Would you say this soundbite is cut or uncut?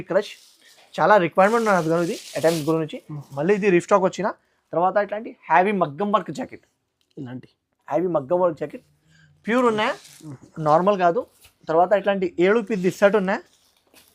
uncut